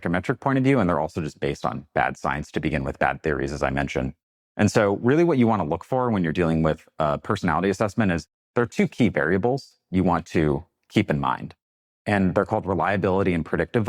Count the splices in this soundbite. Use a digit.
0